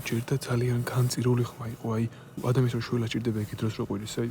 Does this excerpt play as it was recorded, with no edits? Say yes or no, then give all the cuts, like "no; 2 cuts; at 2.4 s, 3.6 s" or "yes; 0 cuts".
no; 1 cut; at 2.4 s